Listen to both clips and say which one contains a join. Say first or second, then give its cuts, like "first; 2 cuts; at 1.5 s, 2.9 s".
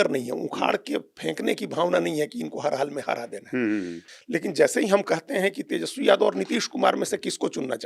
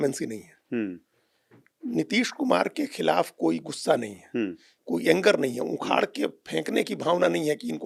first; 1 cut; at 4.1 s